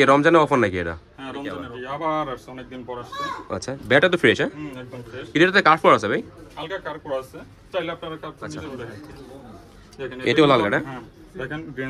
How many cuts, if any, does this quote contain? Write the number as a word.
two